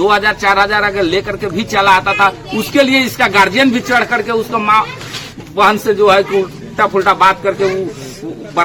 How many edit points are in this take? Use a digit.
0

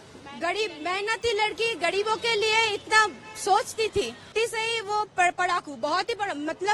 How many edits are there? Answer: 1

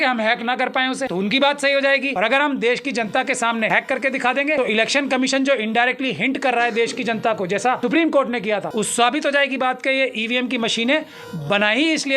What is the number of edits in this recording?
6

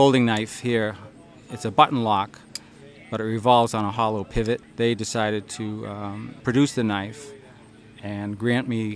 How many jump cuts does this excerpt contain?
2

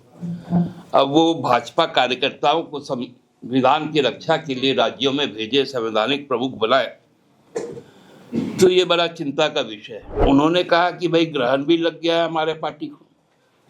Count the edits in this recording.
1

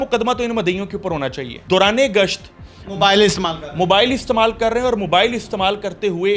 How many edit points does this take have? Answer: 1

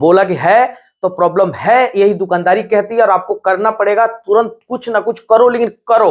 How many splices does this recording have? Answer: 0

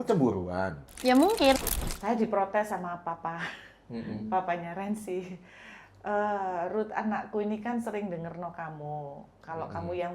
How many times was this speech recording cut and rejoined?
1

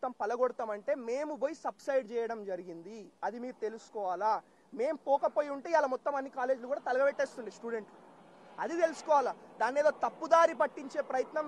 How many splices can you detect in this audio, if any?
0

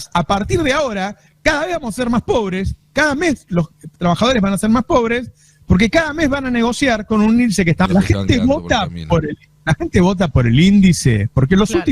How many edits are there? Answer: 1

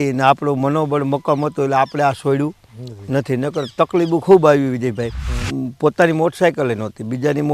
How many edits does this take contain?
1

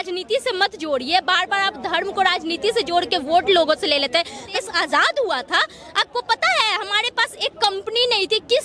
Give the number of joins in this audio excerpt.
1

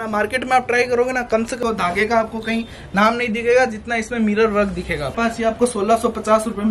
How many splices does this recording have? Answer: 2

